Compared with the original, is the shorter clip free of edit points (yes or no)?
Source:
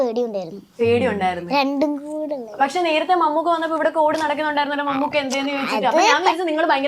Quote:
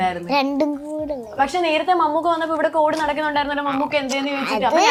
yes